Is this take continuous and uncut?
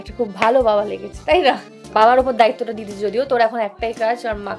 no; 1 cut; at 1.9 s

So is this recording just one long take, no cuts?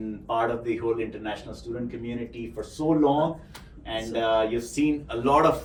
yes; 0 cuts

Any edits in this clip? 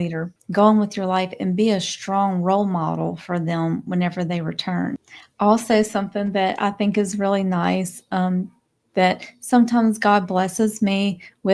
no; 0 cuts

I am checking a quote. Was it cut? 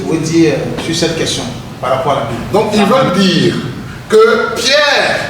yes; 1 cut; at 2.4 s

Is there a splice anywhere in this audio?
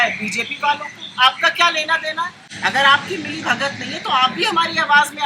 no; 0 cuts

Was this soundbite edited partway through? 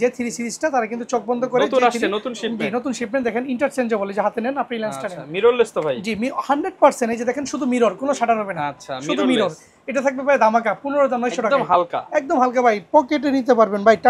no; 0 cuts

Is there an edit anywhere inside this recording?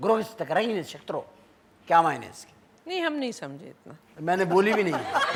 no; 0 cuts

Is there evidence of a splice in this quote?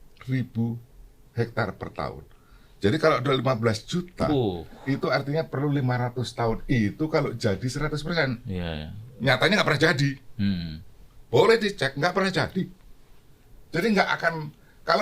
no; 0 cuts

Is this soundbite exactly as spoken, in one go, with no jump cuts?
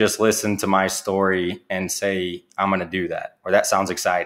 yes; 0 cuts

